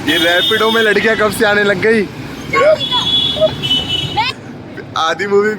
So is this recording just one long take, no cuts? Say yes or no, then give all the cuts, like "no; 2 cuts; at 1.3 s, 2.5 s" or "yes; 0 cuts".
no; 1 cut; at 4.5 s